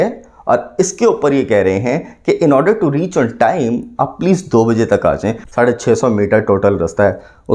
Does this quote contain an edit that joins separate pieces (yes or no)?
yes